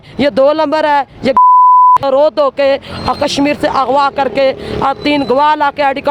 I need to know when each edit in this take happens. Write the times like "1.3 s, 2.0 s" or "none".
2.0 s

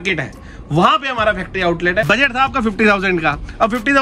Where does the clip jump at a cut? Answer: 2.0 s

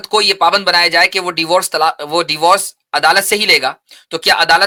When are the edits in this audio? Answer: none

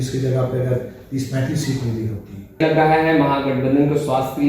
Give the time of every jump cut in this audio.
2.6 s

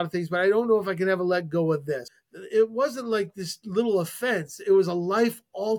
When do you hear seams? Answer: 2.1 s

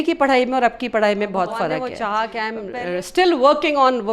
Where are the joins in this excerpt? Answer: 1.9 s

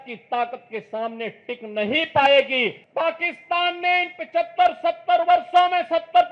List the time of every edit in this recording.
2.8 s

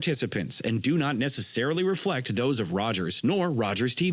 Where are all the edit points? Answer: none

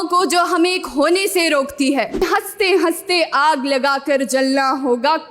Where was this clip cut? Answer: 2.2 s

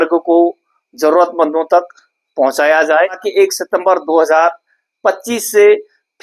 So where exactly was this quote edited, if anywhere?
3.2 s

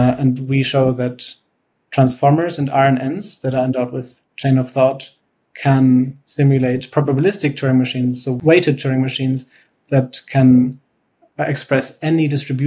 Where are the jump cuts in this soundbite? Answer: 8.3 s

